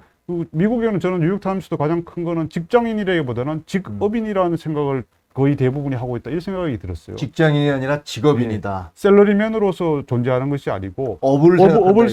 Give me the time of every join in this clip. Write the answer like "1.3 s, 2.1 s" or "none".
none